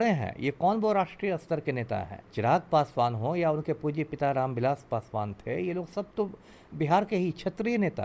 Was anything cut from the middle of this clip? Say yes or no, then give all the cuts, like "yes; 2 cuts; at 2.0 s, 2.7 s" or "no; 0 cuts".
yes; 1 cut; at 2.2 s